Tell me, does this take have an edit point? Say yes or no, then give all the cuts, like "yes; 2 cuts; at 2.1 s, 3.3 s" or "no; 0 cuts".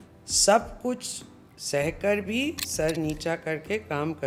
no; 0 cuts